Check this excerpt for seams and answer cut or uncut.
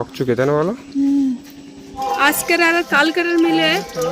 cut